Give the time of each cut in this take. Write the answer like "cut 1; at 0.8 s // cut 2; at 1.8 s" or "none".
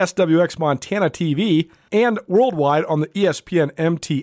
cut 1; at 1.8 s